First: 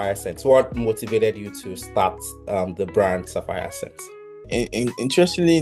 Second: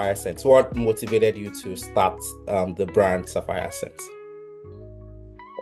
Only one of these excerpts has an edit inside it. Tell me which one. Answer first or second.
first